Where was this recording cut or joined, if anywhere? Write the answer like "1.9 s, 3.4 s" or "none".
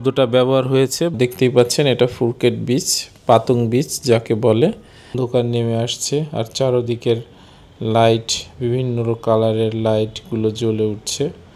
1.1 s, 5.1 s